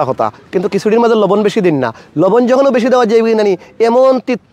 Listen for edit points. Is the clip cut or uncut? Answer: uncut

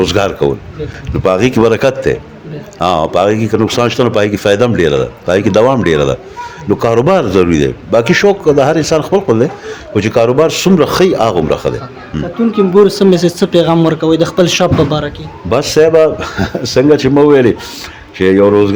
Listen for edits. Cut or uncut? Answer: uncut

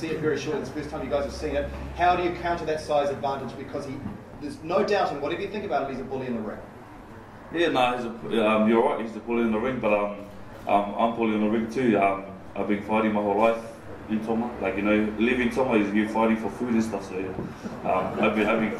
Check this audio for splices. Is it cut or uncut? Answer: cut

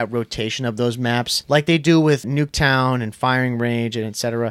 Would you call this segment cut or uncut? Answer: cut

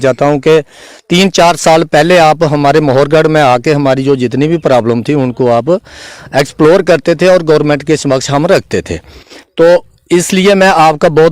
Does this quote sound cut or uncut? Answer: uncut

